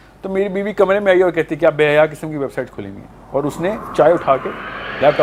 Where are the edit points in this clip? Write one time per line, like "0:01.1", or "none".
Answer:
none